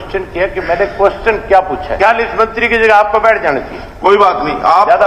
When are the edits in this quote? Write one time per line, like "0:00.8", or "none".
0:01.9